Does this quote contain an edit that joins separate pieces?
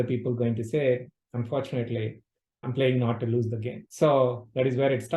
yes; 2 cuts; at 2.7 s, 3.8 s

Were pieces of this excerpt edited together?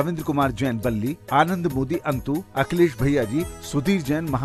no; 0 cuts

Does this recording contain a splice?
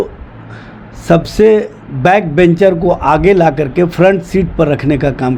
no; 0 cuts

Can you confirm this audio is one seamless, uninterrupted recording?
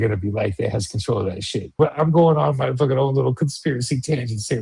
no; 1 cut; at 1.7 s

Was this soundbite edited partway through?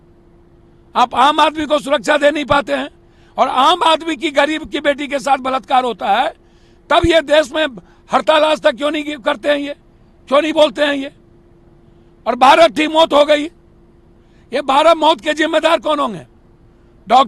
no; 0 cuts

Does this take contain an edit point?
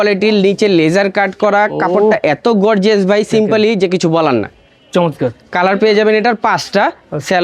no; 0 cuts

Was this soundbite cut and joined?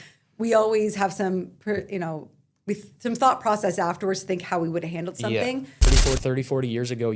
yes; 1 cut; at 6.1 s

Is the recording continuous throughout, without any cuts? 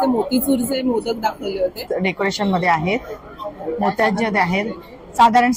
no; 1 cut; at 1.9 s

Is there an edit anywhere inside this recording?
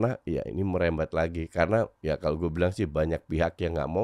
yes; 1 cut; at 2.0 s

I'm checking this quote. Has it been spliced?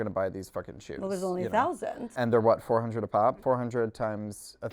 yes; 2 cuts; at 2.1 s, 3.4 s

